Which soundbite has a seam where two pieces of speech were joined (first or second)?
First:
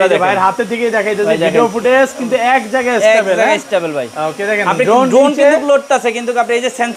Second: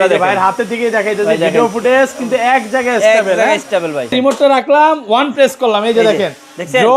second